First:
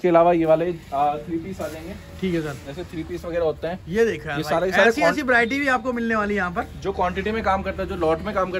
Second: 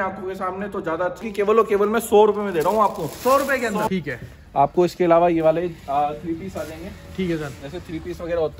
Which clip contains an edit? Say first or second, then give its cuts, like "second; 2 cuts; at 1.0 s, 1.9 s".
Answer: second; 2 cuts; at 1.2 s, 3.9 s